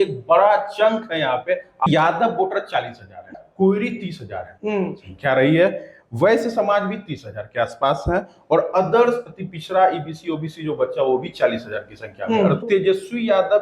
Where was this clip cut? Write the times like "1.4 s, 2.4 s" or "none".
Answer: 1.9 s, 3.4 s, 12.6 s